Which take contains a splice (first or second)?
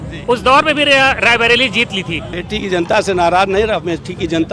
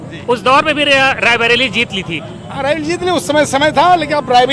first